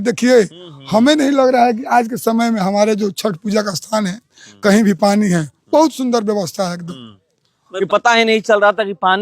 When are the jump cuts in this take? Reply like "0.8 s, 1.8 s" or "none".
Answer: 7.6 s